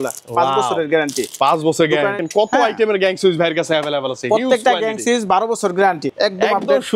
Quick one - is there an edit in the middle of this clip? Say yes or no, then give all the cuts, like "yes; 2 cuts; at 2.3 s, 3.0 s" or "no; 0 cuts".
yes; 2 cuts; at 2.2 s, 6.1 s